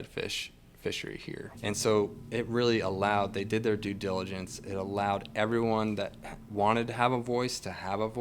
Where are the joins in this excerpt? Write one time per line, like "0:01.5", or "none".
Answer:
0:01.5